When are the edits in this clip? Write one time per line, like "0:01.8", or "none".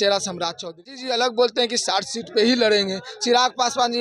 0:01.1